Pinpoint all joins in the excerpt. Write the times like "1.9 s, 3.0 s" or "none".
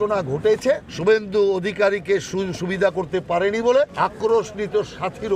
0.9 s, 3.9 s